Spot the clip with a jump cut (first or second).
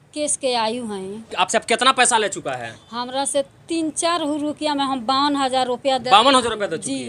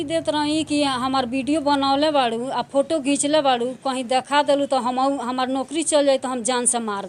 first